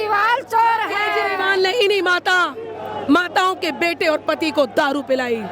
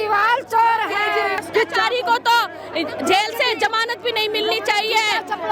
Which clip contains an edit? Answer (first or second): second